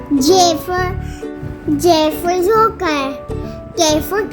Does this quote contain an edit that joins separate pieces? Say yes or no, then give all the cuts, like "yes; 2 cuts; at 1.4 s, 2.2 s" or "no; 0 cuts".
no; 0 cuts